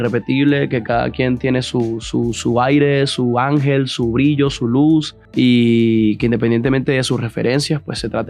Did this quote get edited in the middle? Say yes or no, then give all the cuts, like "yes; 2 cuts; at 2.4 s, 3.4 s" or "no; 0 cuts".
yes; 1 cut; at 5.2 s